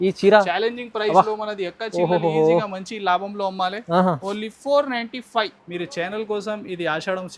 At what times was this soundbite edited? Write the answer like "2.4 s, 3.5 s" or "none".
5.6 s